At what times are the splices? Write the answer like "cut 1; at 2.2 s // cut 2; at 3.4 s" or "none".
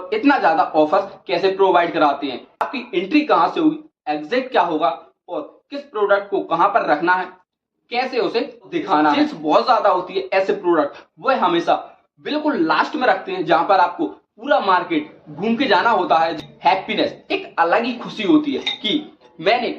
cut 1; at 2.6 s // cut 2; at 9.2 s // cut 3; at 13.6 s // cut 4; at 16.3 s